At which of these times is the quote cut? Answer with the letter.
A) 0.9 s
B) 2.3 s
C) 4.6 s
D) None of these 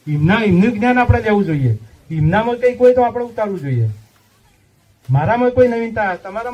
D